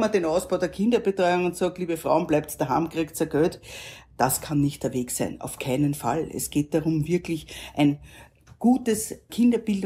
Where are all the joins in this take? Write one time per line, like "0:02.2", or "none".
none